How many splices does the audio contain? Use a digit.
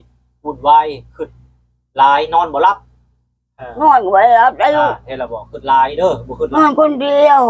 1